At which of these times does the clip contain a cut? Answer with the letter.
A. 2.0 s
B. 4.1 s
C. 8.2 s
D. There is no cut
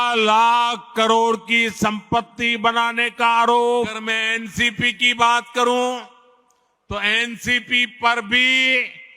B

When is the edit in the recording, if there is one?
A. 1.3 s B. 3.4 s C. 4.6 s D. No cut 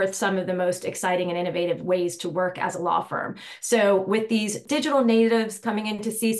C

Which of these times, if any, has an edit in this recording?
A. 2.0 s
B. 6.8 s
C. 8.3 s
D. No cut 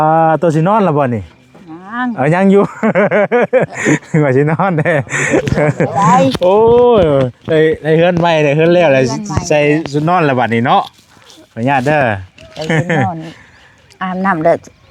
D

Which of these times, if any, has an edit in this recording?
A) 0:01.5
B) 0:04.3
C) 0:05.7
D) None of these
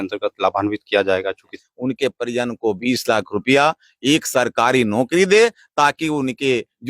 A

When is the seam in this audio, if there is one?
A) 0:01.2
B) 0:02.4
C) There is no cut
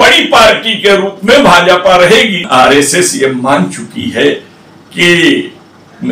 B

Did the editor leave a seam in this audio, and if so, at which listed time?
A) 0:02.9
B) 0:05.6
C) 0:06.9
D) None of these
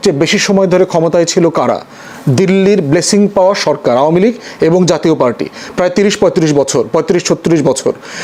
D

